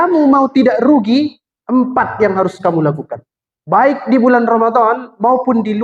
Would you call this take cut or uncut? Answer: uncut